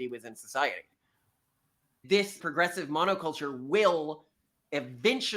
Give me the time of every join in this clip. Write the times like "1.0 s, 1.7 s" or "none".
2.0 s